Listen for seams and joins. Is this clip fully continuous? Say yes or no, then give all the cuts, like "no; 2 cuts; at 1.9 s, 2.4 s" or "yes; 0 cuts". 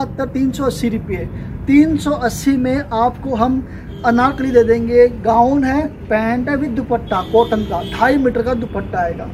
yes; 0 cuts